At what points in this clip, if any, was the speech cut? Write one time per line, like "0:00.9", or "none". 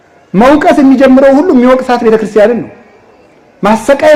none